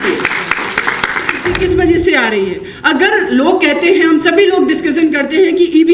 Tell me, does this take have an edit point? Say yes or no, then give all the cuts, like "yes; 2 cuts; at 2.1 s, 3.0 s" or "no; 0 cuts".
yes; 1 cut; at 1.5 s